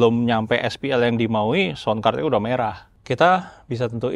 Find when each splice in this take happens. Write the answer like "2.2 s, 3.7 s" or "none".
2.9 s